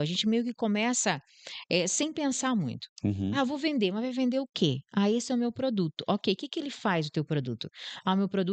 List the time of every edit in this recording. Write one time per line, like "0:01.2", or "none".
none